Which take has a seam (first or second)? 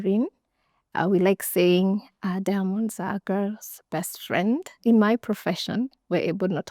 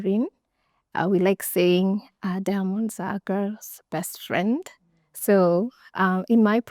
first